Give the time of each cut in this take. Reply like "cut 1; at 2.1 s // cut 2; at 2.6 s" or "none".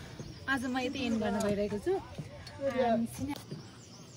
cut 1; at 3.3 s